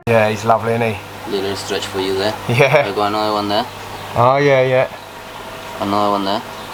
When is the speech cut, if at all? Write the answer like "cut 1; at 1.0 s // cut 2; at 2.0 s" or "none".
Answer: none